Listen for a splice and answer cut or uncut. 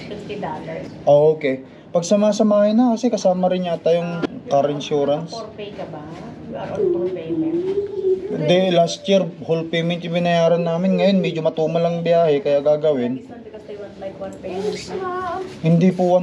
cut